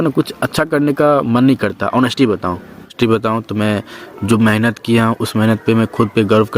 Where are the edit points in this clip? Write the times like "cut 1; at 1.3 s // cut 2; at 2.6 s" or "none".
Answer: cut 1; at 2.9 s